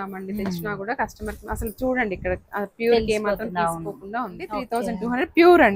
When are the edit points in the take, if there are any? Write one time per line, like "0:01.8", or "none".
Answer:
0:04.6